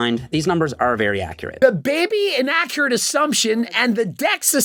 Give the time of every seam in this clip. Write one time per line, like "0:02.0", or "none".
none